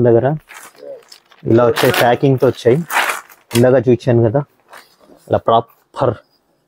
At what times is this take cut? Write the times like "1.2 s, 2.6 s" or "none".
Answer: none